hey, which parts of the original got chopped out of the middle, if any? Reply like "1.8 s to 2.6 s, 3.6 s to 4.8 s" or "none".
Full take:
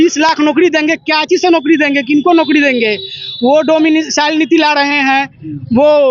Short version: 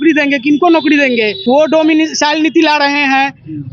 3.0 s to 3.3 s